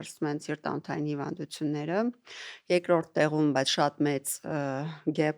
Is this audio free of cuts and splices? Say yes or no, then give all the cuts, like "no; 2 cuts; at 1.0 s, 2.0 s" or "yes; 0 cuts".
yes; 0 cuts